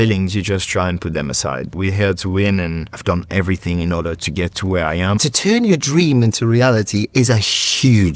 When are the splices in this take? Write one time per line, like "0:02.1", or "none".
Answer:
0:01.8
0:03.0
0:05.2